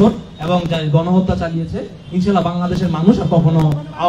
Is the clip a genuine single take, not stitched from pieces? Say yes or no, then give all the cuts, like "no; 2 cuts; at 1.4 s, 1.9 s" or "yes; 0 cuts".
yes; 0 cuts